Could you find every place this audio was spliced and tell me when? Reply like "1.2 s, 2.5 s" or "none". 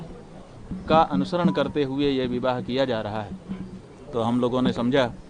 none